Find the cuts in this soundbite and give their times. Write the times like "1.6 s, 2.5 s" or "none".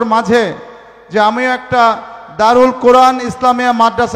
none